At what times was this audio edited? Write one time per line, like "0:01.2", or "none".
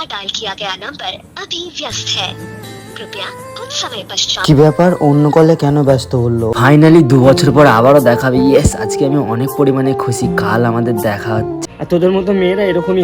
0:06.5
0:11.6